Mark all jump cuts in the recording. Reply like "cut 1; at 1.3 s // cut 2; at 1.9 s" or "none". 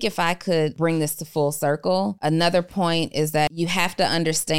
cut 1; at 0.7 s // cut 2; at 2.2 s // cut 3; at 3.5 s

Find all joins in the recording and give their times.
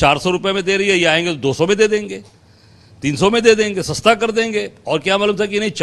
none

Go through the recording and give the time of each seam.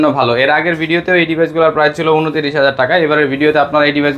none

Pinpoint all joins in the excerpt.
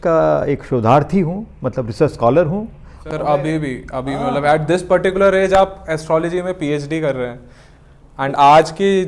none

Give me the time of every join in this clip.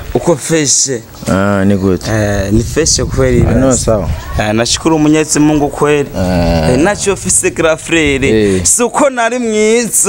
none

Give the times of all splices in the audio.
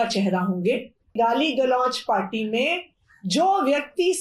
cut 1; at 1.1 s

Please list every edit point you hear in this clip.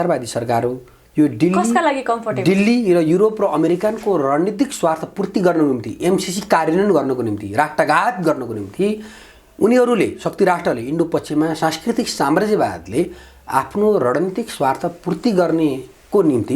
none

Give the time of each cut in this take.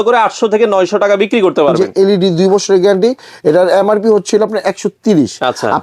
cut 1; at 1.8 s

